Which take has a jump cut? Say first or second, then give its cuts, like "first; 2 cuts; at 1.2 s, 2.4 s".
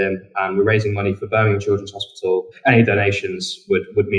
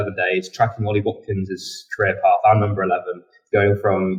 first; 1 cut; at 2.5 s